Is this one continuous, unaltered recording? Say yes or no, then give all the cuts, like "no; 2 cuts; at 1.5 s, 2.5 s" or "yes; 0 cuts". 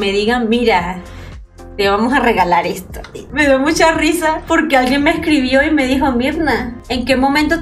no; 2 cuts; at 3.4 s, 4.4 s